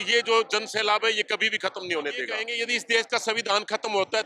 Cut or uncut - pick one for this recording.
cut